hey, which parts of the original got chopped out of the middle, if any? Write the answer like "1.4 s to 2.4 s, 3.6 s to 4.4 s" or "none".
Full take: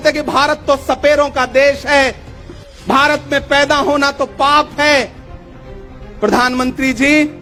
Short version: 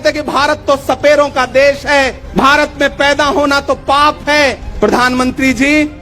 2.2 s to 2.7 s, 5.2 s to 6.1 s